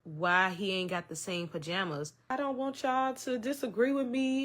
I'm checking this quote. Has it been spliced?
yes; 1 cut; at 2.2 s

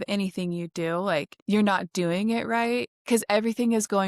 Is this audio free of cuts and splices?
no; 2 cuts; at 1.3 s, 2.9 s

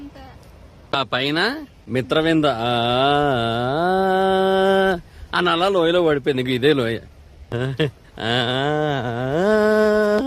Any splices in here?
yes; 3 cuts; at 0.8 s, 1.7 s, 7.5 s

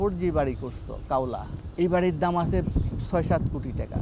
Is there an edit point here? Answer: yes; 1 cut; at 1.6 s

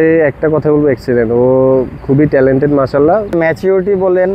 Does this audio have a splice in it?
yes; 1 cut; at 3.3 s

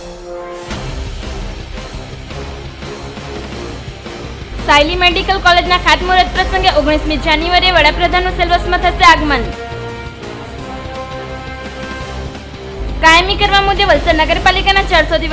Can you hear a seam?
yes; 1 cut; at 4.4 s

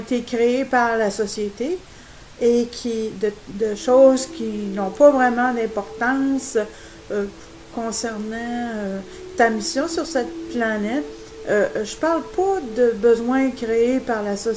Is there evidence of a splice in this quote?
no; 0 cuts

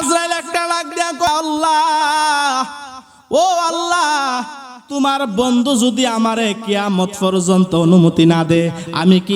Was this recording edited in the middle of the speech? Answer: yes; 1 cut; at 1.3 s

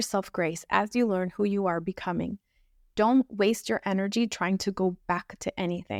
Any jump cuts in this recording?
no; 0 cuts

